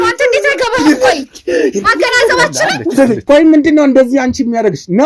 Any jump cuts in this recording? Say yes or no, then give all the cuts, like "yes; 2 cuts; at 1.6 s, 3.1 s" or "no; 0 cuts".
yes; 1 cut; at 3.2 s